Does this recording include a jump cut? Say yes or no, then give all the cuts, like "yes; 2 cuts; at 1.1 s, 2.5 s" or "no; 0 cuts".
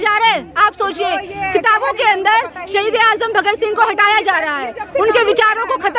no; 0 cuts